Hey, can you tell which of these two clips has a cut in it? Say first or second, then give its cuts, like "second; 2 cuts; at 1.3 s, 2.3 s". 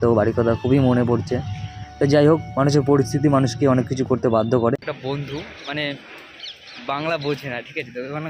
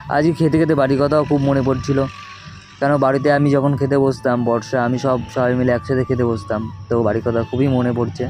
first; 1 cut; at 4.9 s